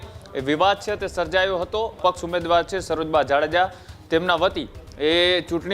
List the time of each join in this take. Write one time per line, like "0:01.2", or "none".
0:02.0